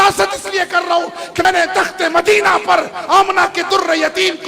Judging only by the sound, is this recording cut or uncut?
cut